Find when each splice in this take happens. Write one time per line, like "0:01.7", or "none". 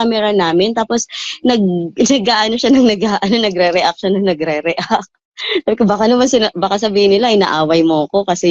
none